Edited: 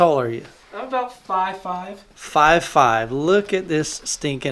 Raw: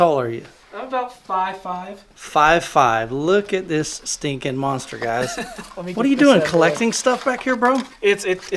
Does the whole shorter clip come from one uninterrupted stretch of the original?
yes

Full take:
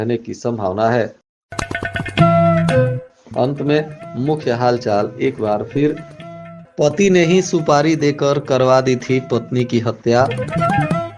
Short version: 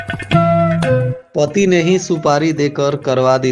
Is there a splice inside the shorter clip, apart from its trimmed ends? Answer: yes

